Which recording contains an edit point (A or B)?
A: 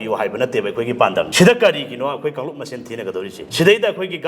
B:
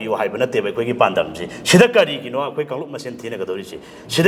A